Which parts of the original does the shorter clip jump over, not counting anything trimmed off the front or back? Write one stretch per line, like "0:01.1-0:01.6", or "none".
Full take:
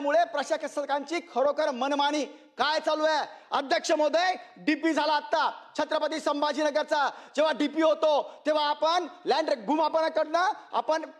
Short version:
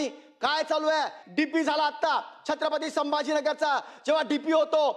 0:03.4-0:04.5